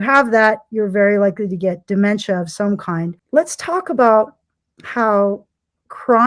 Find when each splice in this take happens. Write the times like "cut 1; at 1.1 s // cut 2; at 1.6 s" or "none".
cut 1; at 3.2 s